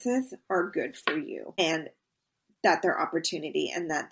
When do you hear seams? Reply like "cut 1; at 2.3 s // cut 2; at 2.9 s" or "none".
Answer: cut 1; at 1.6 s